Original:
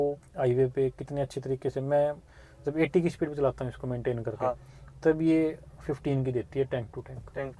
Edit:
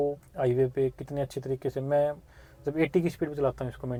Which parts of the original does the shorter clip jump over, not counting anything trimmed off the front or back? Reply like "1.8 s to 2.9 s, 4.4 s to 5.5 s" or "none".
none